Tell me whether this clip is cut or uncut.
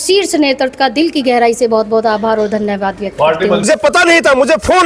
cut